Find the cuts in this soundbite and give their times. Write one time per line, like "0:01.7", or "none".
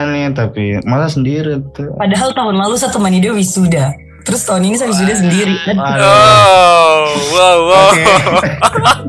none